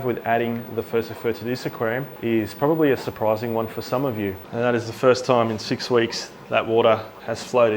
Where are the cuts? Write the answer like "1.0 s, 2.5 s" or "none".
2.1 s, 4.4 s